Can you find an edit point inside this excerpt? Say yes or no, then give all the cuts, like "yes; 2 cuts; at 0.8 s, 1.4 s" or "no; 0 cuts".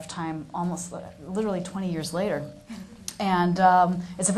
yes; 1 cut; at 1.3 s